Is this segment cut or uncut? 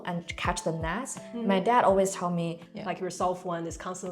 cut